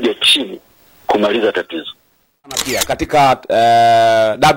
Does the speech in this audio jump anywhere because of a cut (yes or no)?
yes